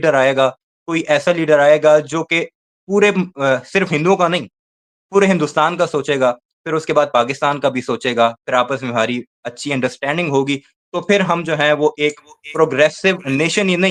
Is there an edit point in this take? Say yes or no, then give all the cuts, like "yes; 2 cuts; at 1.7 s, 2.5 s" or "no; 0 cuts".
no; 0 cuts